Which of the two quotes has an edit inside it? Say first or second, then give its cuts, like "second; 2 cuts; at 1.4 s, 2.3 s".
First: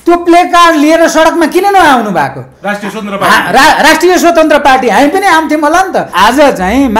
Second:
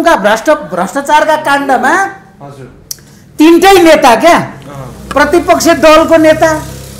first; 1 cut; at 6.0 s